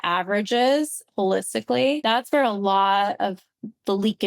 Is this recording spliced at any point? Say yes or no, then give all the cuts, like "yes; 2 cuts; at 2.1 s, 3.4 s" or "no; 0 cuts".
yes; 1 cut; at 2.0 s